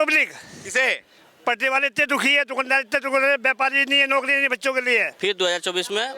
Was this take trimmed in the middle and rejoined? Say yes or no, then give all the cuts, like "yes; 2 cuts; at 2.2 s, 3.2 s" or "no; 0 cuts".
yes; 1 cut; at 5.1 s